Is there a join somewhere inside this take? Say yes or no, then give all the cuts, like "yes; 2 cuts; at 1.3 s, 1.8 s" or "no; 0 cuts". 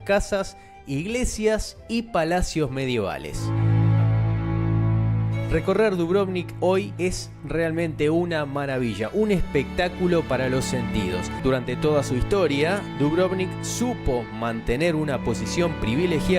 yes; 2 cuts; at 3.5 s, 11.3 s